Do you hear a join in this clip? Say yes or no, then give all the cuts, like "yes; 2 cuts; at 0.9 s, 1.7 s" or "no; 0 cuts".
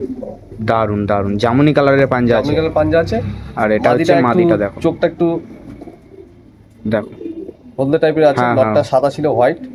no; 0 cuts